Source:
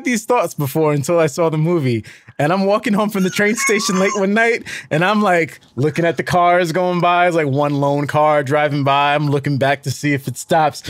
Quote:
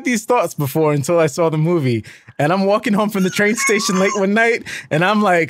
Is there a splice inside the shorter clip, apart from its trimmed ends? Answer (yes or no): no